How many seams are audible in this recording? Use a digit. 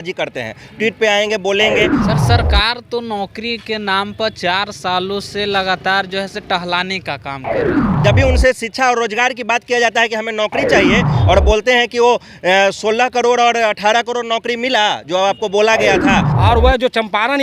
4